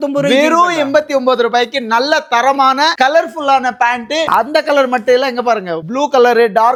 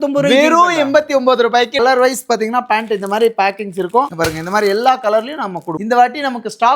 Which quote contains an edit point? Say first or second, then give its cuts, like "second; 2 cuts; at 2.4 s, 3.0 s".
second; 2 cuts; at 1.8 s, 5.7 s